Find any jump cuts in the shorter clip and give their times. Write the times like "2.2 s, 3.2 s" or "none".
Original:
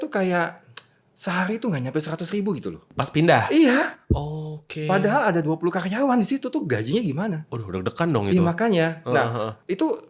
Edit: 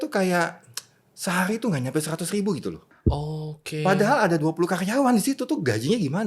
2.9 s